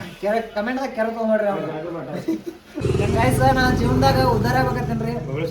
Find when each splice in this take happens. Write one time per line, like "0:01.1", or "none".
0:02.8